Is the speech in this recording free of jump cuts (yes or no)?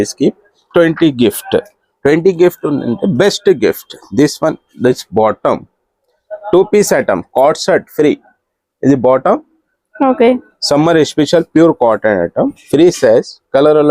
yes